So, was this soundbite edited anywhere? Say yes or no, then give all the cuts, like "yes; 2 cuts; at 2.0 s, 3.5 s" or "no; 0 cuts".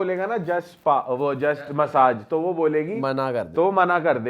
no; 0 cuts